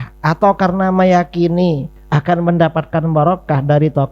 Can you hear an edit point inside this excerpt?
yes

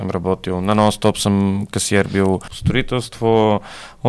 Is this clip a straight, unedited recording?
no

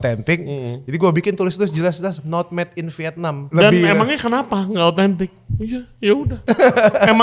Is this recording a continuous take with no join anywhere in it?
no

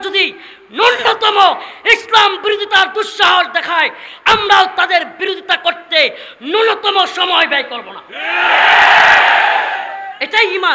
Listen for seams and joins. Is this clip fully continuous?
yes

